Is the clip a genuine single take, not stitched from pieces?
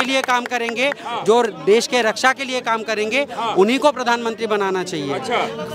yes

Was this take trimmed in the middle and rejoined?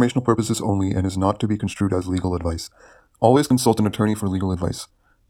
no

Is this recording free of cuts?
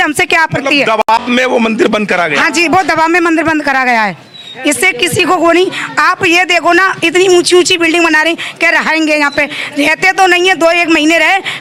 yes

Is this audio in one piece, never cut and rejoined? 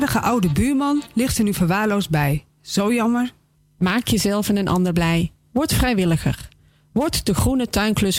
yes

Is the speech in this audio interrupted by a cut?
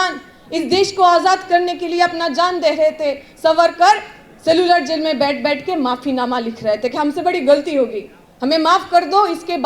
no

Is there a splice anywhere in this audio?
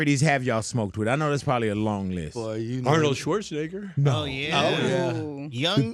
no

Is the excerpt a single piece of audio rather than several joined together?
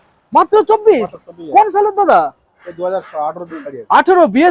yes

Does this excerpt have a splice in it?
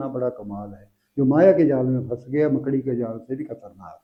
no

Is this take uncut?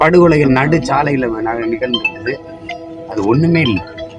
yes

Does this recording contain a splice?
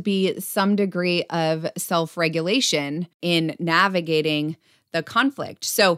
yes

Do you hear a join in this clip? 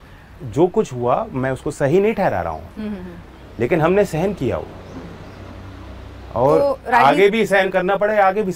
no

